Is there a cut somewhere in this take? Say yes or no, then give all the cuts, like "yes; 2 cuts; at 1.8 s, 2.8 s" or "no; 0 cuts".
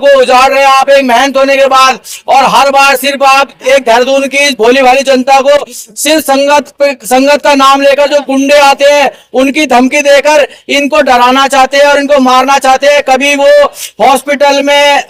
no; 0 cuts